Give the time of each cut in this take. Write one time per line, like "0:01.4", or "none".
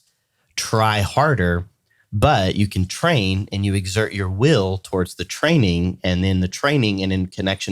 none